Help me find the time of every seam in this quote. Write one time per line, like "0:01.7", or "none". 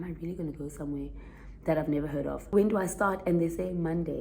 0:02.5